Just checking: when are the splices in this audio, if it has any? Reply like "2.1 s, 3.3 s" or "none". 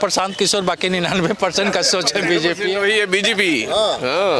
none